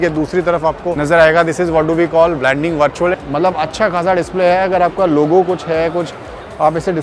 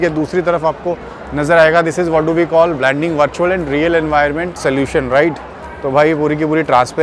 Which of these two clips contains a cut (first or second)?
first